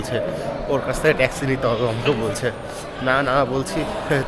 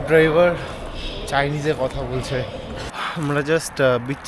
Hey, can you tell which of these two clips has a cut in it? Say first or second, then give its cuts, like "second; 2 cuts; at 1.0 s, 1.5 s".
second; 1 cut; at 2.9 s